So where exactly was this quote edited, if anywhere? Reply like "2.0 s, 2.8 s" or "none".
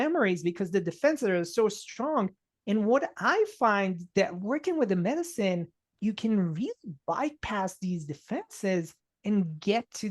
5.9 s